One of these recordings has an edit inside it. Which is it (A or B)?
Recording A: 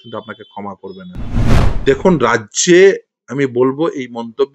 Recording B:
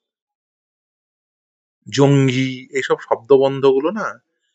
A